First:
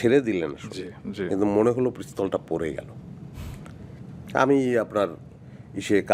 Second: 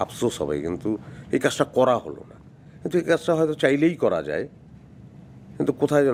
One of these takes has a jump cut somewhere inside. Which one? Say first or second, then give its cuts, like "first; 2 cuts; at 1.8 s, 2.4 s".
first; 1 cut; at 4.0 s